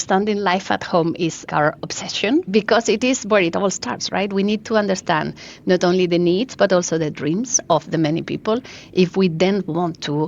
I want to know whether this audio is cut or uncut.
cut